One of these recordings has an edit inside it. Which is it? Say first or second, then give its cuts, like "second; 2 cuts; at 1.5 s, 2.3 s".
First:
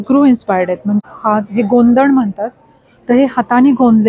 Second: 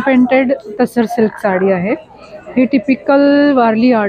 first; 1 cut; at 1.0 s